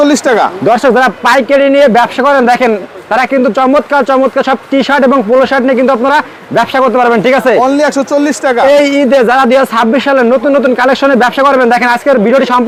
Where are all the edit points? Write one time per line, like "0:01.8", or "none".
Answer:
none

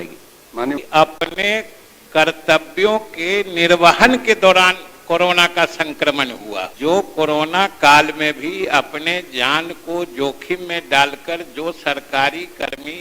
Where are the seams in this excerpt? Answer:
0:00.8
0:06.7

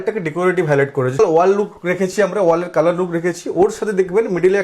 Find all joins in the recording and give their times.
0:01.2

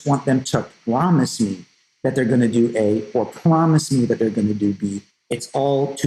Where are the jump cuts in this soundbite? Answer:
0:05.1

